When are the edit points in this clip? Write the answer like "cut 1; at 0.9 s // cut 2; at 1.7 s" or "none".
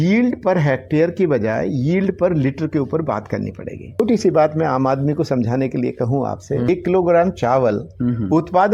cut 1; at 4.0 s // cut 2; at 6.7 s